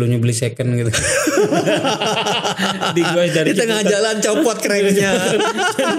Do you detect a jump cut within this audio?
no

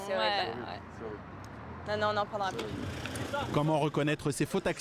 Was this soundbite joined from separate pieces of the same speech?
yes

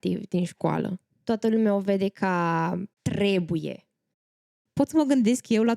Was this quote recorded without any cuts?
no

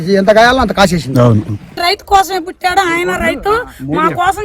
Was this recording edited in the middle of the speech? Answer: yes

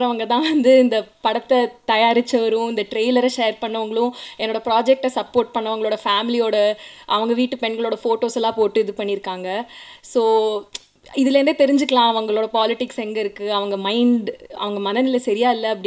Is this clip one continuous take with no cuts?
yes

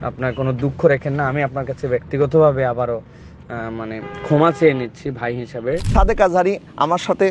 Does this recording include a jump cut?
yes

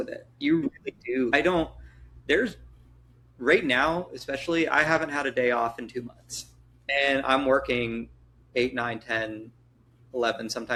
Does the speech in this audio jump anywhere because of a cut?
no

